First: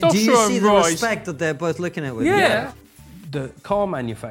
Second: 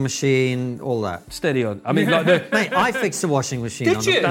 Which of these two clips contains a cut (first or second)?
first